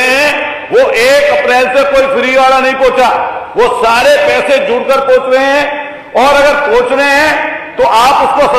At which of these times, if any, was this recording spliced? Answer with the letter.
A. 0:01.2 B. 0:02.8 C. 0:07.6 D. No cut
D